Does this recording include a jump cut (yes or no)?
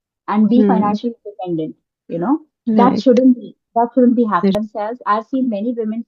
yes